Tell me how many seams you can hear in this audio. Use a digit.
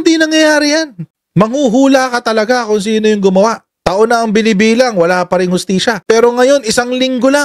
1